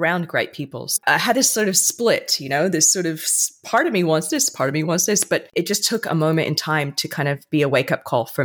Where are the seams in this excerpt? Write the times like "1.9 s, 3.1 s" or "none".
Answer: 1.0 s, 5.5 s